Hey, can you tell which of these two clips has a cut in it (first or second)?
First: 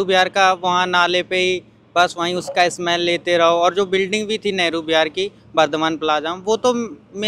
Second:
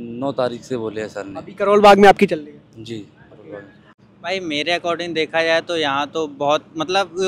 second